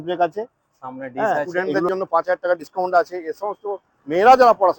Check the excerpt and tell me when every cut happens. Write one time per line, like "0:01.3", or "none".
0:01.9